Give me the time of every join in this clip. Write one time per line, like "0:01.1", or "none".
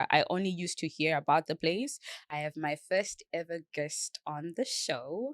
0:02.3

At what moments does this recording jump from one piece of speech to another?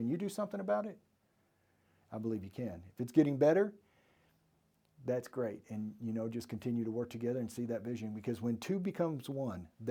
none

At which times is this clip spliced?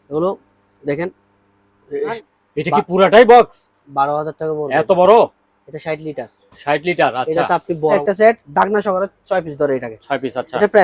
0:02.3
0:08.0

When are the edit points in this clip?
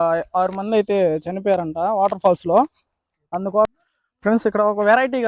0:03.7

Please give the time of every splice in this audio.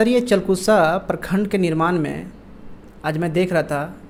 none

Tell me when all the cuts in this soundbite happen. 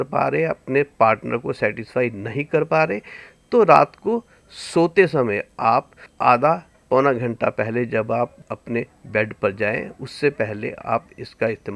0:06.0
0:06.7
0:08.5

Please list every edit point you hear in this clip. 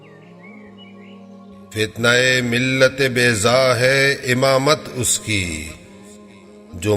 0:01.7

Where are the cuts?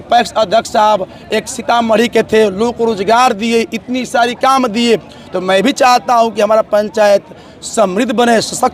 none

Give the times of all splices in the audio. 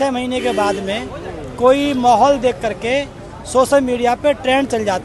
none

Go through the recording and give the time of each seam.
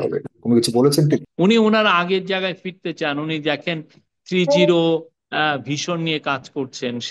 0:01.2

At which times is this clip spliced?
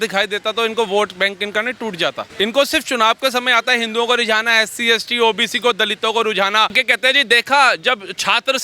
0:02.2
0:06.8

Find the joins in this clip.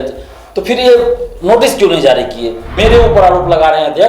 0:02.8

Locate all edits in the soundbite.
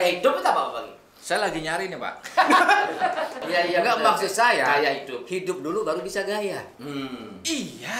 0:03.4

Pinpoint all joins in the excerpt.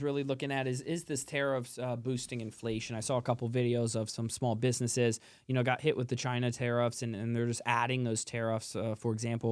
none

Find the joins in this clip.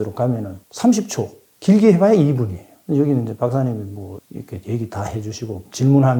none

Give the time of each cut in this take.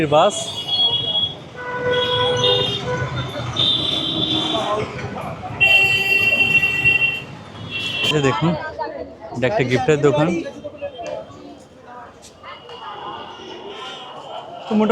0:08.1

